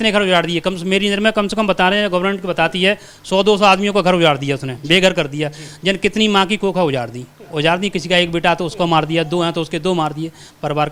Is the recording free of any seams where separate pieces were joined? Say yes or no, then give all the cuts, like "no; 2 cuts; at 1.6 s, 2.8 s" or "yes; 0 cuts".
yes; 0 cuts